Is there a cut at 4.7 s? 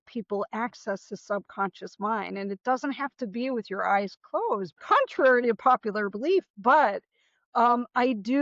yes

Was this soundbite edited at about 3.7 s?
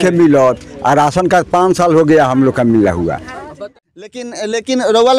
yes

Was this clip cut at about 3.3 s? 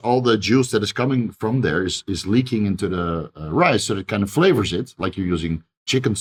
no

